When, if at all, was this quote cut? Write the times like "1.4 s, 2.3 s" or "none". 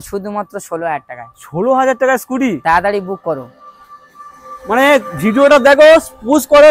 none